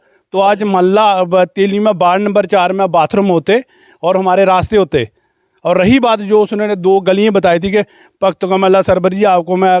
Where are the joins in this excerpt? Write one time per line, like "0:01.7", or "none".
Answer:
none